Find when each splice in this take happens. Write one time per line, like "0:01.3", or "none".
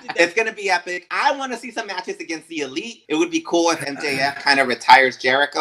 0:01.0
0:03.0